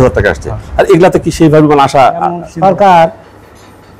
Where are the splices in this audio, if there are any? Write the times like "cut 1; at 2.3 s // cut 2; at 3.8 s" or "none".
cut 1; at 2.5 s